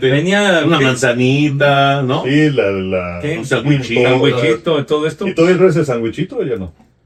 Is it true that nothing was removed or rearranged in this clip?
yes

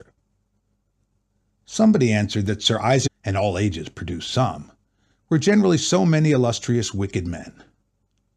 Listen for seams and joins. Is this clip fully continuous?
yes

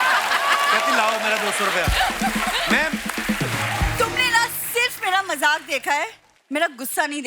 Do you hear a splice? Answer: no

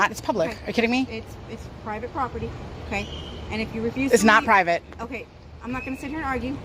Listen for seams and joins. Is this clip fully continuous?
yes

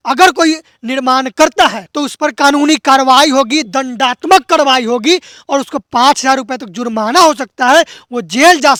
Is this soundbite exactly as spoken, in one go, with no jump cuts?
yes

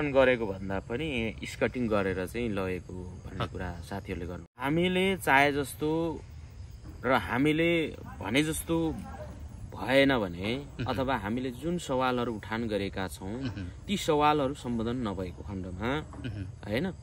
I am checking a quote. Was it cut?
yes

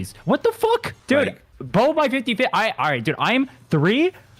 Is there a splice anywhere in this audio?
yes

